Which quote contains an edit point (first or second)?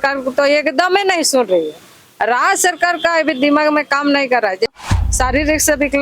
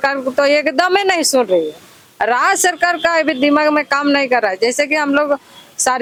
first